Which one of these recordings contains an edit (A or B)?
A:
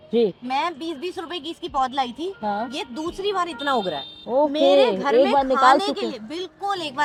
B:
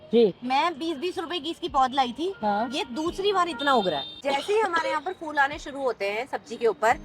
B